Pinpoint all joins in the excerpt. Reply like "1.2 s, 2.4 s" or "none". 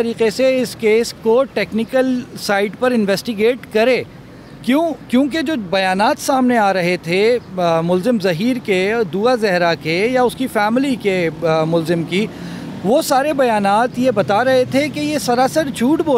none